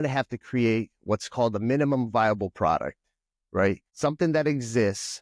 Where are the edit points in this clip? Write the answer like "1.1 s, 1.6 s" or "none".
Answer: 3.9 s